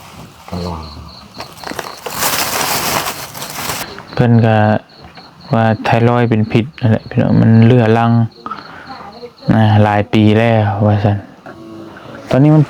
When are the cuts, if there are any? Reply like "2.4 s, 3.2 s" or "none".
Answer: 3.9 s, 11.4 s